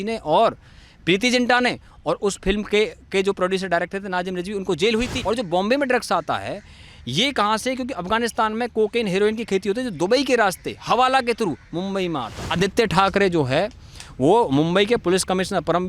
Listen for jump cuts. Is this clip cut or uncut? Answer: cut